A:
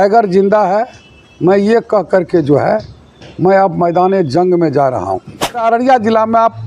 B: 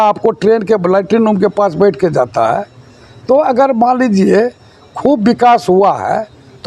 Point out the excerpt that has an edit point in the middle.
A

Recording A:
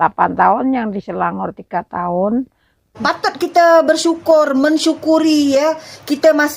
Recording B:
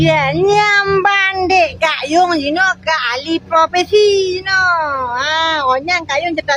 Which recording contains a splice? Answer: A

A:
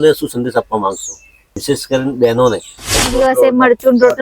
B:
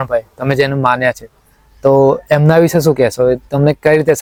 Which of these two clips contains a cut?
A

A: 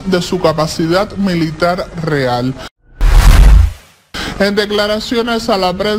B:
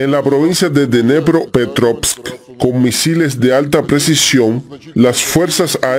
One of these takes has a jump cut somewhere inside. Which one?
A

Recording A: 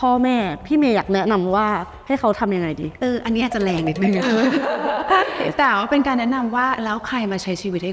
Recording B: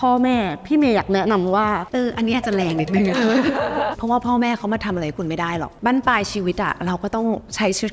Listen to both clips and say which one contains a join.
B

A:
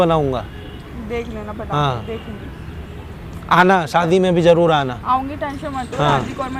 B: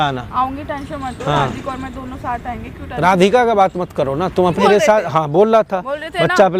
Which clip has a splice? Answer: B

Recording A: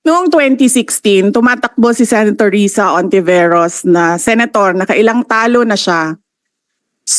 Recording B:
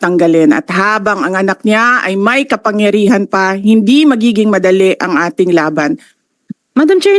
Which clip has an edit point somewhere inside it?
B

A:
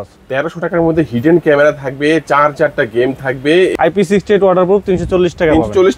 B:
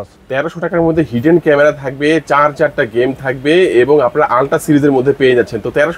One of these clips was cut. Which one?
A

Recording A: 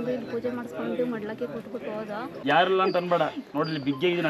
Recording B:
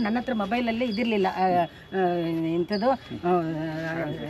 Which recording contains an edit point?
A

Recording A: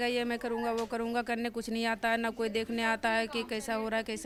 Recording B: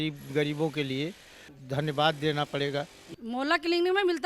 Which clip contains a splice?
B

